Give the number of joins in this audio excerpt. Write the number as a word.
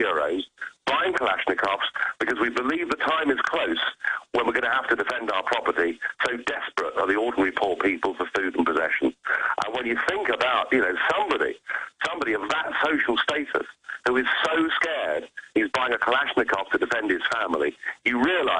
one